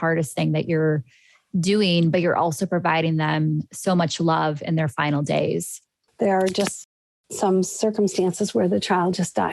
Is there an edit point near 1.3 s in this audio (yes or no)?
no